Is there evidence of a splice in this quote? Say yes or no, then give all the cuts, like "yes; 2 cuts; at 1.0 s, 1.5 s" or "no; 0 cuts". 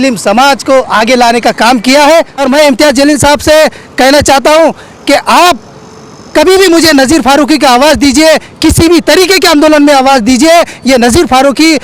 yes; 1 cut; at 2.4 s